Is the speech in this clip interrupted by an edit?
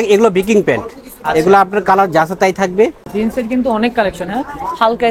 yes; 1 cut; at 3.0 s

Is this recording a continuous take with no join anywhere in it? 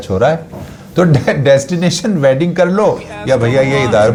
yes; 0 cuts

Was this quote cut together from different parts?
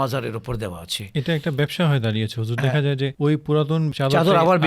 no; 0 cuts

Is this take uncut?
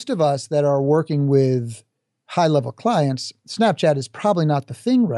yes; 0 cuts

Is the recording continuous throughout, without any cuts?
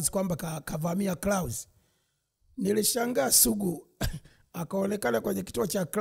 yes; 0 cuts

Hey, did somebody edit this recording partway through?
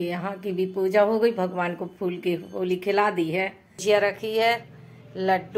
yes; 1 cut; at 3.7 s

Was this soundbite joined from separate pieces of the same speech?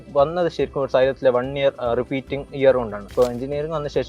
yes; 1 cut; at 3.1 s

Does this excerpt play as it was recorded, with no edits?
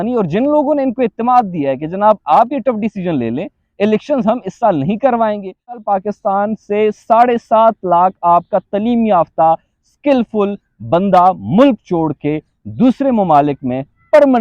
no; 1 cut; at 5.8 s

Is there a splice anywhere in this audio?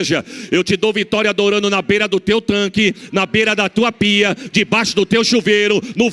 no; 0 cuts

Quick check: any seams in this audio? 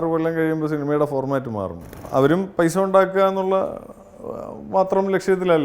yes; 1 cut; at 2.0 s

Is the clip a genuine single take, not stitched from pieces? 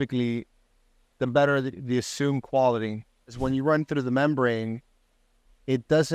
no; 1 cut; at 3.4 s

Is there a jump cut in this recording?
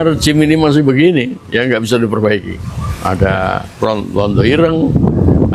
no; 0 cuts

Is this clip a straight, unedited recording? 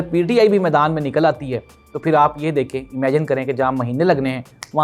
yes; 0 cuts

